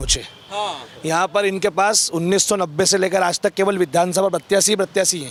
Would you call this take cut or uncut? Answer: uncut